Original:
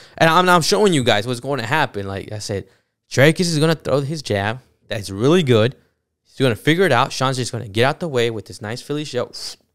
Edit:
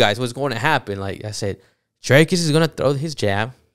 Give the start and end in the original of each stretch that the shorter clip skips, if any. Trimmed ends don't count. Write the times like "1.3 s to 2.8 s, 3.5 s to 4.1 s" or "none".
none